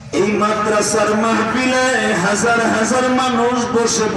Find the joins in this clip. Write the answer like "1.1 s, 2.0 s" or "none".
none

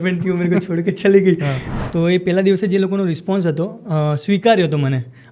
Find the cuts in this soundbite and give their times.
1.6 s

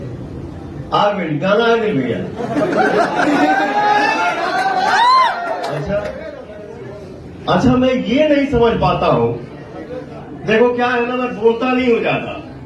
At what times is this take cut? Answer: none

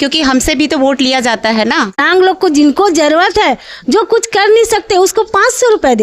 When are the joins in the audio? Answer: 2.0 s

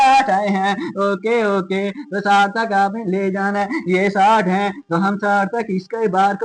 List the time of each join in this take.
none

